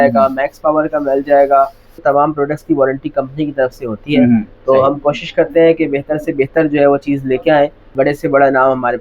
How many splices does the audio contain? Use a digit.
2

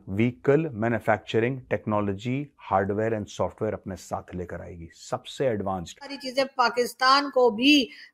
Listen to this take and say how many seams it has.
1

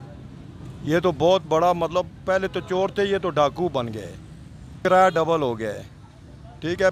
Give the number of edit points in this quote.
1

